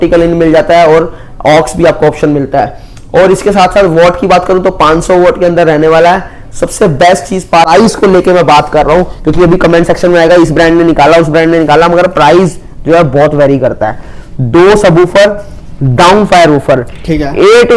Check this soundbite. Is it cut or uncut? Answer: cut